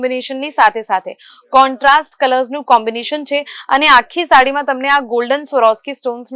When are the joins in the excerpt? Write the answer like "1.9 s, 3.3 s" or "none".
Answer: none

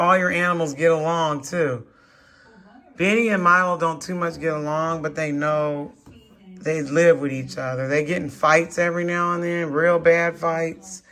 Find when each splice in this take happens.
none

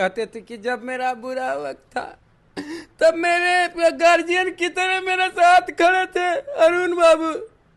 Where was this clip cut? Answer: none

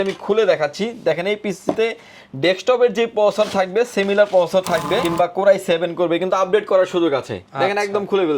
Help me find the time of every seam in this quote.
5.1 s

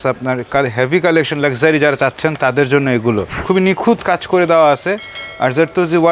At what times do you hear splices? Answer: 3.3 s

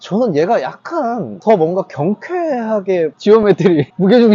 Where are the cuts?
3.1 s

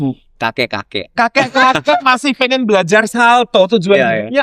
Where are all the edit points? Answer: none

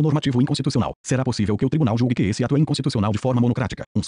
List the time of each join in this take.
1.0 s, 2.9 s

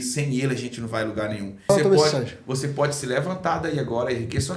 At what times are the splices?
1.7 s

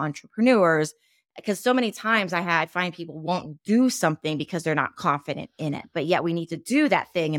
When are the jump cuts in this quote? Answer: none

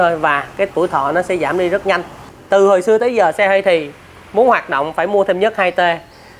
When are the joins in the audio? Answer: 2.2 s

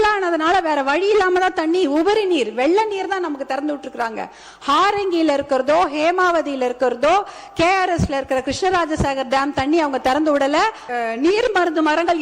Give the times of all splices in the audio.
10.8 s

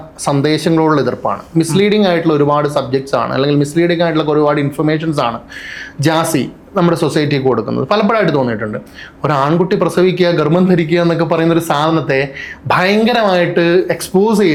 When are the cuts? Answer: none

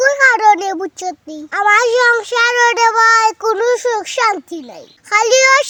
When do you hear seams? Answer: none

